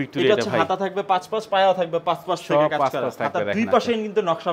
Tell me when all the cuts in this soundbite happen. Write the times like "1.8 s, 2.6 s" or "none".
none